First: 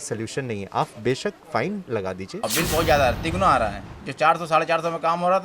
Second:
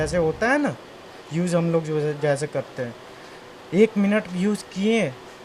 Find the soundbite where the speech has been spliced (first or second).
first